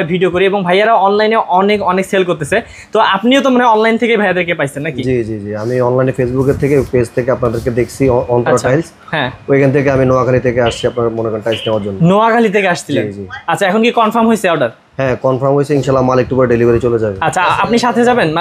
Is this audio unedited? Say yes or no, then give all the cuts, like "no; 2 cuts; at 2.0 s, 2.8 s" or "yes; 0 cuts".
yes; 0 cuts